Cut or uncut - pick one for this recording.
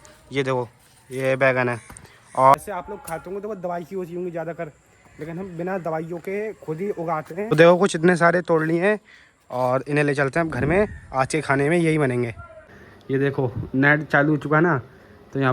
cut